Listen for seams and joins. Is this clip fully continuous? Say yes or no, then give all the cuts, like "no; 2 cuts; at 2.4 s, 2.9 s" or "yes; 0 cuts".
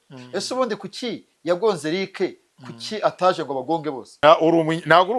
no; 1 cut; at 4.1 s